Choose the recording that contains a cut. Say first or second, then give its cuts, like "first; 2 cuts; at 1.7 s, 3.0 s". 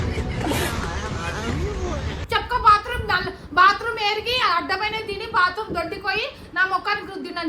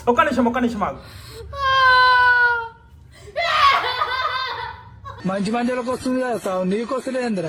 first; 1 cut; at 2.1 s